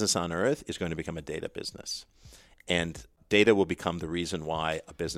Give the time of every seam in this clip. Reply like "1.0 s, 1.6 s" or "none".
3.2 s